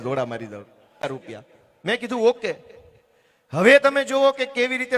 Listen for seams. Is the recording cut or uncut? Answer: cut